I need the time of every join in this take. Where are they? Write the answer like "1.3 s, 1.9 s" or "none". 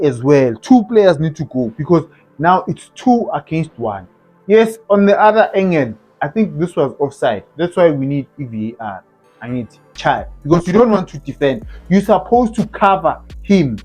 9.8 s